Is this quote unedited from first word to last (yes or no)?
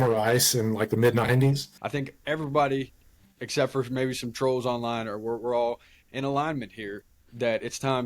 no